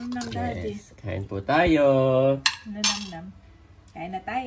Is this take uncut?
yes; 0 cuts

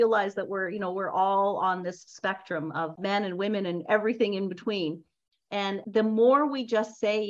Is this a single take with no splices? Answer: no; 1 cut; at 3.0 s

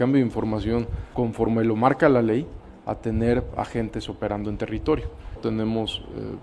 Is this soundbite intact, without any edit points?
no; 2 cuts; at 1.0 s, 5.4 s

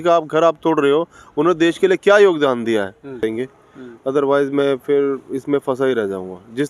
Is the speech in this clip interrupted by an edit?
yes; 1 cut; at 3.2 s

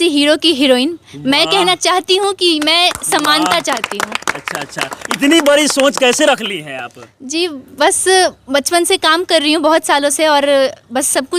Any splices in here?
no; 0 cuts

